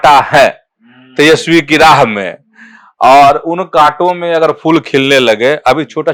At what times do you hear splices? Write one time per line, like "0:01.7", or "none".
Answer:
none